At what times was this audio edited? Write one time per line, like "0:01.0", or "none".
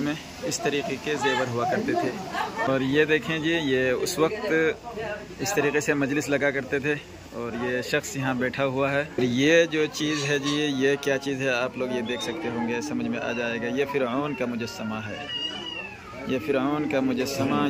0:02.7
0:09.2